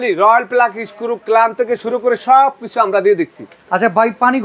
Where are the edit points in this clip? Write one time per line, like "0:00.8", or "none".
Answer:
none